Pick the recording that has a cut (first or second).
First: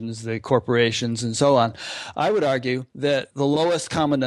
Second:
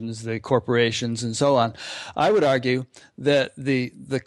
first